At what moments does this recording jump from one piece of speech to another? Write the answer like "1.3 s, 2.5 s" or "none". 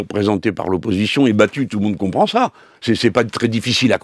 none